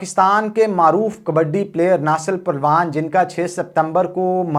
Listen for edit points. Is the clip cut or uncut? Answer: uncut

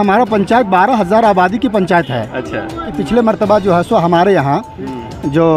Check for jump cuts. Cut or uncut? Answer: cut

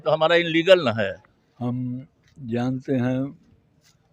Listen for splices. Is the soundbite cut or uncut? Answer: cut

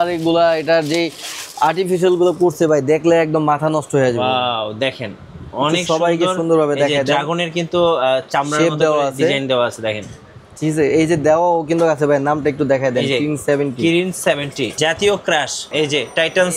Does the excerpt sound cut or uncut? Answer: cut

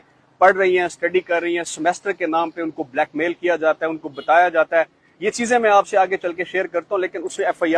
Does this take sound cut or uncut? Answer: uncut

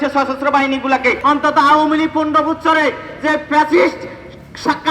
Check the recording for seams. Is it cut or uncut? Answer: cut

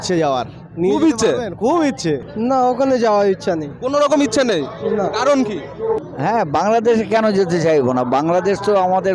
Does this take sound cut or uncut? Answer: cut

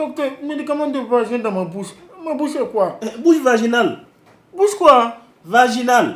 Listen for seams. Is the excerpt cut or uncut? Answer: uncut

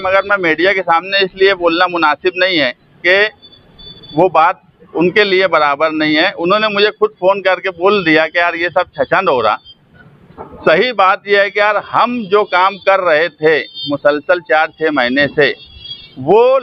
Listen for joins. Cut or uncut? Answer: uncut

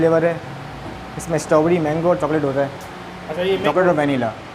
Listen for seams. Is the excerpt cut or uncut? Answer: cut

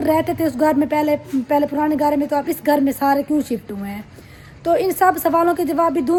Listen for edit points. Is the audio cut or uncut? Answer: uncut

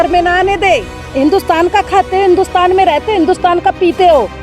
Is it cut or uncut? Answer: cut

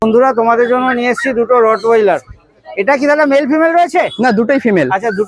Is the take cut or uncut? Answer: uncut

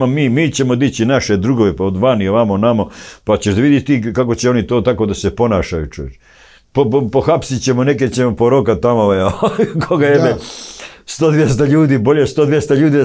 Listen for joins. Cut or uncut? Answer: uncut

